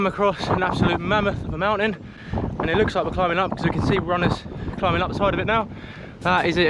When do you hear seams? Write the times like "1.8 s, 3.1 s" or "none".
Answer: none